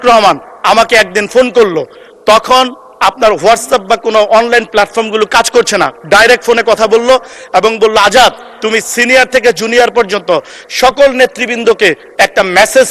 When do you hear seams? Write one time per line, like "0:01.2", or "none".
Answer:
none